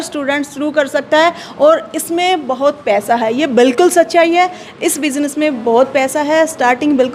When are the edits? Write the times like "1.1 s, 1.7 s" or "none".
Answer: none